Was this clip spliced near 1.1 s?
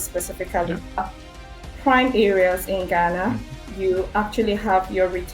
yes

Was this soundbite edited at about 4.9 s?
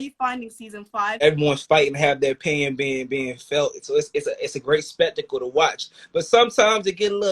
no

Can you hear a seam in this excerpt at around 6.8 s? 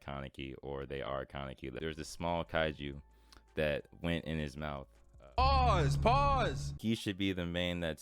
yes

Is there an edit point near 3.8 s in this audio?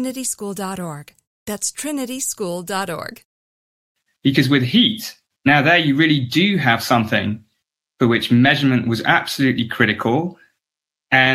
yes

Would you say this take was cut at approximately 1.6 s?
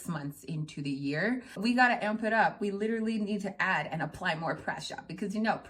yes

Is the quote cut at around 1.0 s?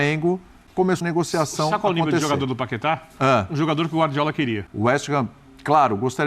yes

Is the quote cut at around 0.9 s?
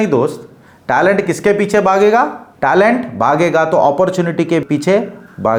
no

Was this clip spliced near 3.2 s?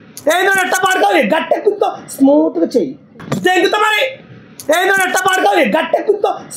yes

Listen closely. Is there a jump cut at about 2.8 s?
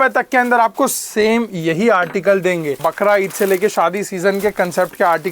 yes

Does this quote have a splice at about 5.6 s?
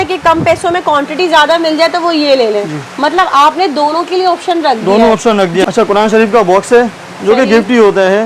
yes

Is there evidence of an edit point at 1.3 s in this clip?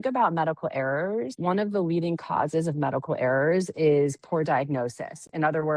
yes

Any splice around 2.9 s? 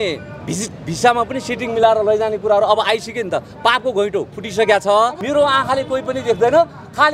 no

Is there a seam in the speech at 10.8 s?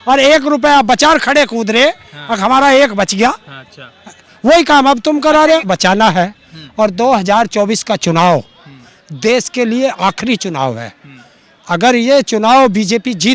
no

